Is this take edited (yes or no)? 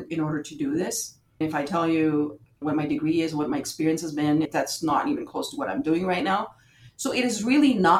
yes